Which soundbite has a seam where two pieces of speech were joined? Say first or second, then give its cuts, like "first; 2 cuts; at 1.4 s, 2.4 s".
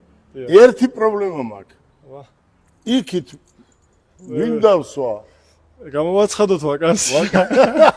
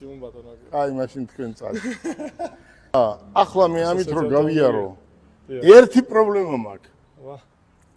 second; 1 cut; at 2.9 s